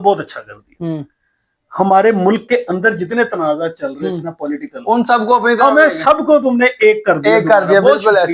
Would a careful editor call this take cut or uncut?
uncut